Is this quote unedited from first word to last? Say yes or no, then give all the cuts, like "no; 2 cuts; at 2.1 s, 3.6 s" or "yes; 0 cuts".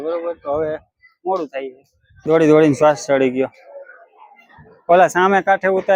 no; 1 cut; at 2.0 s